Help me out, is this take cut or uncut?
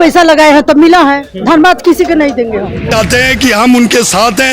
cut